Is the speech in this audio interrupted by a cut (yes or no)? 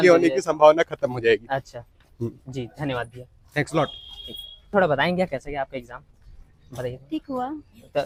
no